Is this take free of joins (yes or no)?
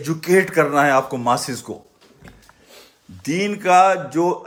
yes